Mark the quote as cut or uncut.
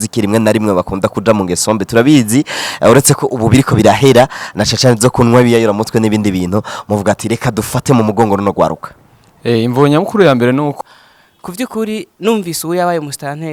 cut